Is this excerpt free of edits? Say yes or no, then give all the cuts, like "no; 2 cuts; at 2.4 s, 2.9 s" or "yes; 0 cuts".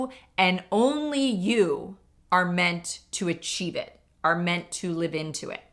yes; 0 cuts